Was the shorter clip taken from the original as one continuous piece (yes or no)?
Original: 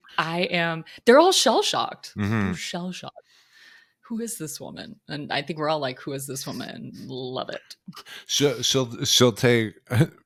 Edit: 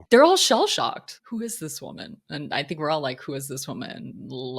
no